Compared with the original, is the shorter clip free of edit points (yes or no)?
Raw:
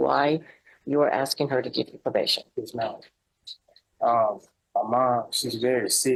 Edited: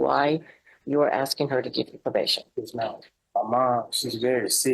no